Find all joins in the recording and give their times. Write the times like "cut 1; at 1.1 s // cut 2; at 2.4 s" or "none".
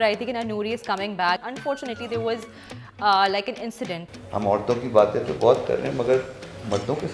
cut 1; at 1.4 s // cut 2; at 4.0 s